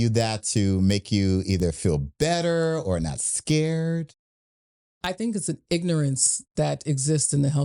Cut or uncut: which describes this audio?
uncut